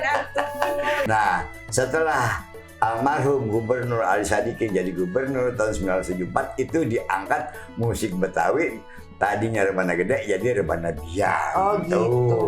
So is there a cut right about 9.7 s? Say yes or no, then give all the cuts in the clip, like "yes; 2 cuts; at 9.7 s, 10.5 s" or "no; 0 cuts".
no; 1 cut; at 1.0 s